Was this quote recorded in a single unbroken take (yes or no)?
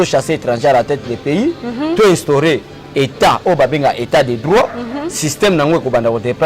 yes